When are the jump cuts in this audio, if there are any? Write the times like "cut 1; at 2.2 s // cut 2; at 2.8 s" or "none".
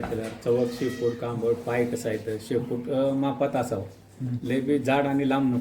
none